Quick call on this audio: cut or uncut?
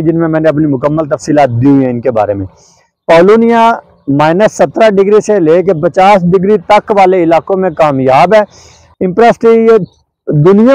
cut